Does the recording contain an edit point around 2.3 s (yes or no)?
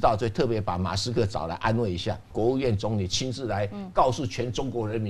yes